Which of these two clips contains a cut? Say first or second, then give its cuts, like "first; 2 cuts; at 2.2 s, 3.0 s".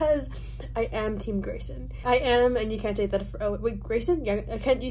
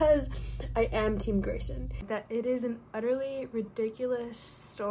second; 1 cut; at 2.0 s